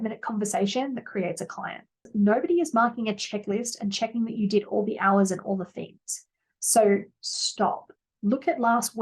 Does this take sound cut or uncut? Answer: cut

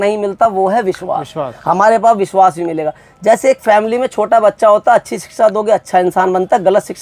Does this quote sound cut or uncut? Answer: uncut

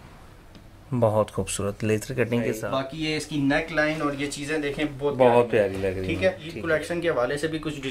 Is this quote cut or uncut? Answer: cut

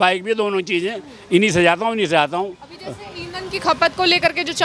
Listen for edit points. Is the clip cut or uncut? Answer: uncut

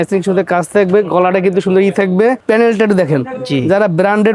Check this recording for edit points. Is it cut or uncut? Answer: cut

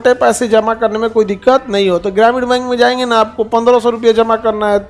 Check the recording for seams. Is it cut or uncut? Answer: uncut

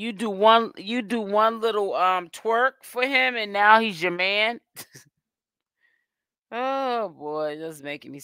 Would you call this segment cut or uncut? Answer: uncut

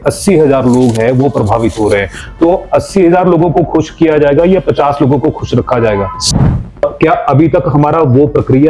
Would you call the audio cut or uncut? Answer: cut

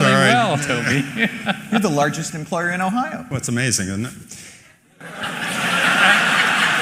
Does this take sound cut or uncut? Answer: uncut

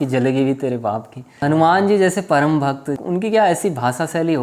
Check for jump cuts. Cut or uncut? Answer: cut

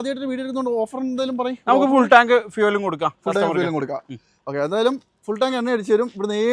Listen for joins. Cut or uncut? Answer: uncut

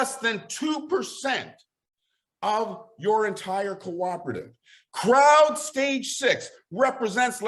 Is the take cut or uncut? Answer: uncut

